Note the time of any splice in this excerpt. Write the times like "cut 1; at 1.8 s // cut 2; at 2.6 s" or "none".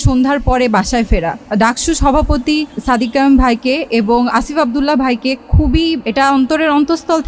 cut 1; at 1.4 s // cut 2; at 2.8 s // cut 3; at 4.3 s // cut 4; at 6.0 s